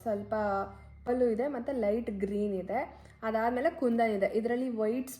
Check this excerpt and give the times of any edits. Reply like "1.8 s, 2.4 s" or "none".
1.1 s